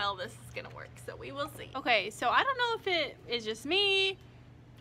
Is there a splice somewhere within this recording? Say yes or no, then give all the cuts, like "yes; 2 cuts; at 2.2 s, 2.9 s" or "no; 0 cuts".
yes; 1 cut; at 1.6 s